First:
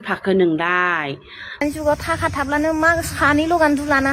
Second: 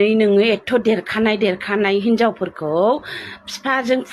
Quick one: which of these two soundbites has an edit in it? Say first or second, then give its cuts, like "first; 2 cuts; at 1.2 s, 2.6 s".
first; 1 cut; at 1.6 s